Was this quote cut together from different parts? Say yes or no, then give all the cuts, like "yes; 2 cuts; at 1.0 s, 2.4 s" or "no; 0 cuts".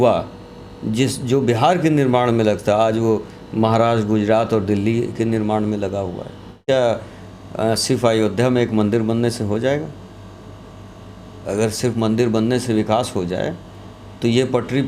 yes; 1 cut; at 6.6 s